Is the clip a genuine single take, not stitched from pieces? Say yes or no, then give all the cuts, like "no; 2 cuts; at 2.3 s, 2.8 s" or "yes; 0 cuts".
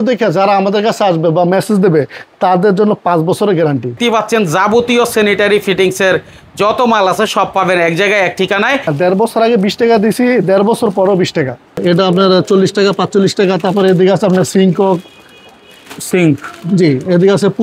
no; 3 cuts; at 4.0 s, 8.9 s, 11.8 s